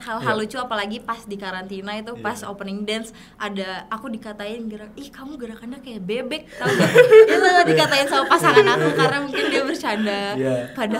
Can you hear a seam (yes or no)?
no